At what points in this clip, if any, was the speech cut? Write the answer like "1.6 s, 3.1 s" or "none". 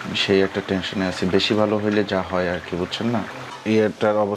3.4 s